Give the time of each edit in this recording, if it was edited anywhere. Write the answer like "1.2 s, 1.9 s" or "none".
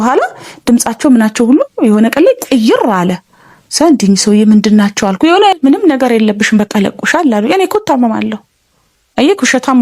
5.5 s